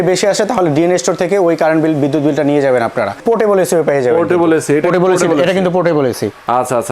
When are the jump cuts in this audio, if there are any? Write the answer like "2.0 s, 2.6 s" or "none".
3.2 s